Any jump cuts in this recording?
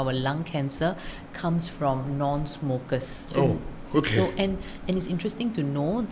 no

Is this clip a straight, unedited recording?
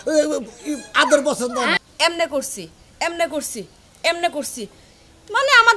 no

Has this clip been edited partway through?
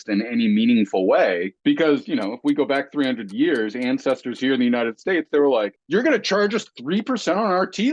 yes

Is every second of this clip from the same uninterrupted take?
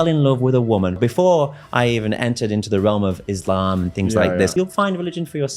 no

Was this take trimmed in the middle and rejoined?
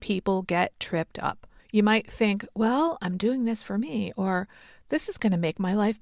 yes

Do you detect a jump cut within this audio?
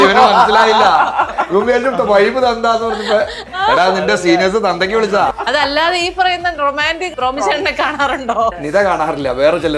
yes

